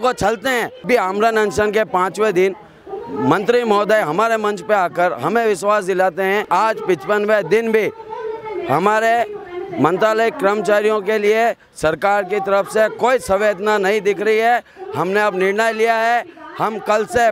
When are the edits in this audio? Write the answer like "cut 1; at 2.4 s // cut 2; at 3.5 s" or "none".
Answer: cut 1; at 0.8 s // cut 2; at 6.5 s